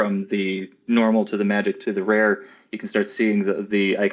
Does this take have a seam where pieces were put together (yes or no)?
no